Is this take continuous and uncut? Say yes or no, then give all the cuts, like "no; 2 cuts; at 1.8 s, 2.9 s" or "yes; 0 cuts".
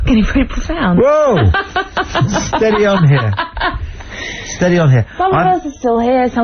no; 1 cut; at 4.4 s